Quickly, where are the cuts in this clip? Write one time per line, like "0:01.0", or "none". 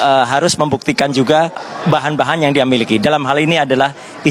0:01.7